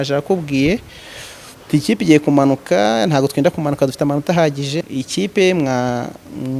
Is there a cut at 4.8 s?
yes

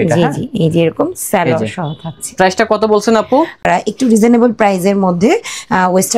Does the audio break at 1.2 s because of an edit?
no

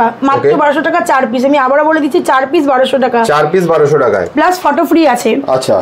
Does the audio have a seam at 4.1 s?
no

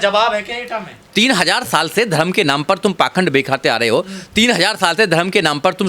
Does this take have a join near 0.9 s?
yes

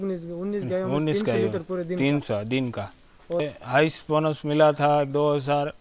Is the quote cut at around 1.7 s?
no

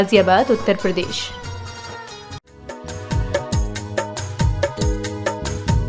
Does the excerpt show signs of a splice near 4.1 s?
no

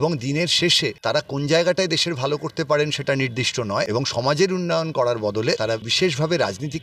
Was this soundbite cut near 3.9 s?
yes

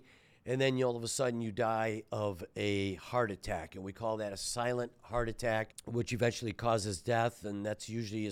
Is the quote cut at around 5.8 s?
yes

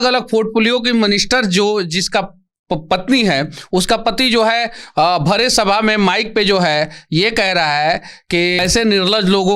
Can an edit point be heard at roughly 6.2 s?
no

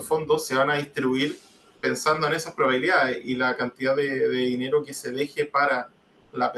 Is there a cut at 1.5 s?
no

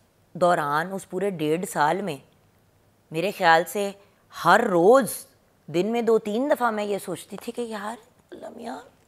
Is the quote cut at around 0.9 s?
no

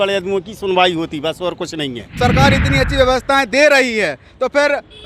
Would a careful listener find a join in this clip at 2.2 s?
yes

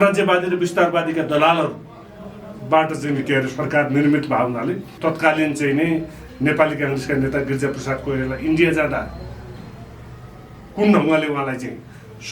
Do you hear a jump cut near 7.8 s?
no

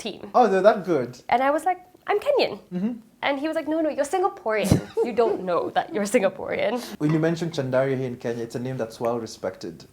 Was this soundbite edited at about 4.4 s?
no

